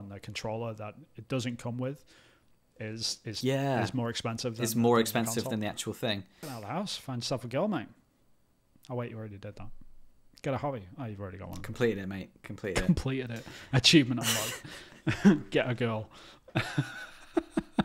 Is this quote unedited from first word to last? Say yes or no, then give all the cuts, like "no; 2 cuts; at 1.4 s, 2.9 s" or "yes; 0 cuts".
no; 1 cut; at 6.4 s